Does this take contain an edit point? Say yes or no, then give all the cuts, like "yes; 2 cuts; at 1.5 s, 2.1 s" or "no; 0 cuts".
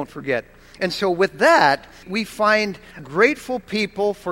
yes; 2 cuts; at 2.1 s, 3.0 s